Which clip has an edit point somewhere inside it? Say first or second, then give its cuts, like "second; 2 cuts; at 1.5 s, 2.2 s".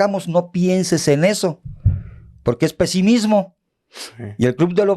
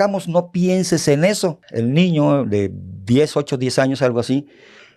second; 1 cut; at 1.6 s